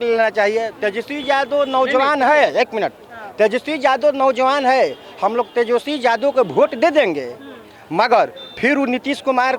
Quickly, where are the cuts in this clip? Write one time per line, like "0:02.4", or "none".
none